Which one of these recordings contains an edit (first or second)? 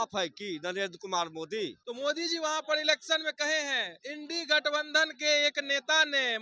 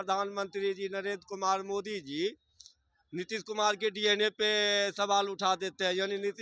first